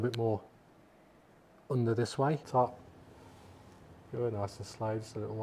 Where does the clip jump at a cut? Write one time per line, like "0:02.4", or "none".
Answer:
0:02.4